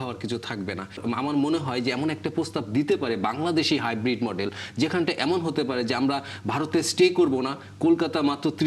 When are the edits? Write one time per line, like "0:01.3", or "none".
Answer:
0:01.0